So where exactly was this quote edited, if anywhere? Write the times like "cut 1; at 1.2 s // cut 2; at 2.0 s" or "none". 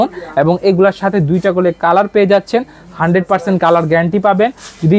none